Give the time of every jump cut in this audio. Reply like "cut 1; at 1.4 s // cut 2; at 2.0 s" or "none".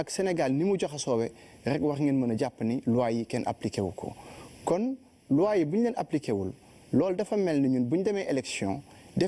cut 1; at 1.7 s